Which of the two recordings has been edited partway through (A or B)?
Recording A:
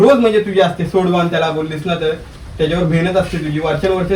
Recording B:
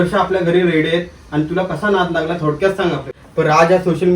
B